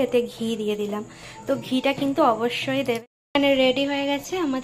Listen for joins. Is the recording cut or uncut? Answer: cut